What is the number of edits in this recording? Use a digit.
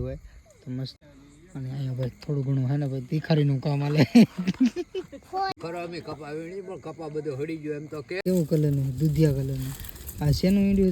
3